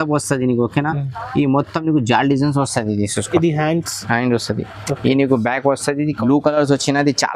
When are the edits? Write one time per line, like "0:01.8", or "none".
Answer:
0:06.2